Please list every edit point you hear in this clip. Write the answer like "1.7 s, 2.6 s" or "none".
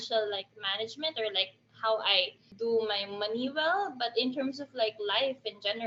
none